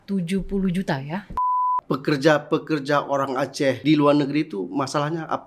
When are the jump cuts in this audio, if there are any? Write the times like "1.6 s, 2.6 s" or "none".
1.5 s, 3.8 s

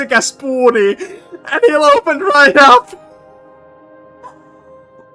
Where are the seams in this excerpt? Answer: none

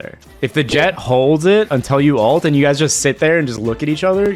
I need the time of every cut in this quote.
none

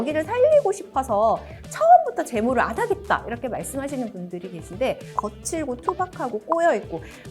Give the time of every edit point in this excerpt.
5.0 s

